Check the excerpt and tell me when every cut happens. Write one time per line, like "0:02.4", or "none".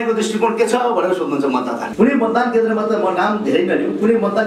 0:01.8